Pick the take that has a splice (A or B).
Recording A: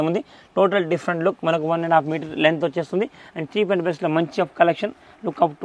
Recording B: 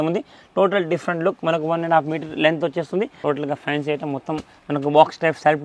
B